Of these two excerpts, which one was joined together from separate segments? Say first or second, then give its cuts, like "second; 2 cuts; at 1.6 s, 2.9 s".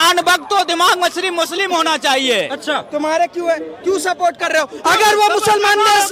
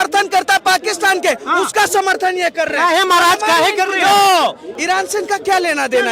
second; 1 cut; at 4.7 s